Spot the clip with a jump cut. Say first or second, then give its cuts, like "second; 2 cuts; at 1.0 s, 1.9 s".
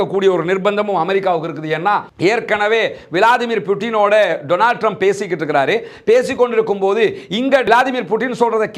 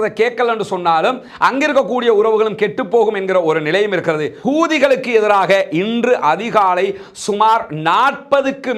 second; 1 cut; at 4.3 s